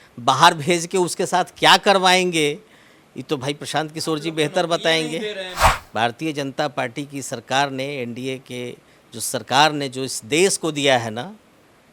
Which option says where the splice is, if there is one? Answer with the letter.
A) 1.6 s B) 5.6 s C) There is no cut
B